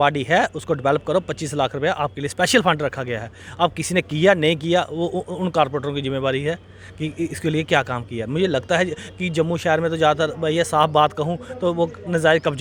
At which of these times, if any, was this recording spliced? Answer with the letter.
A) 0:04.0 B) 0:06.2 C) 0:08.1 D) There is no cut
D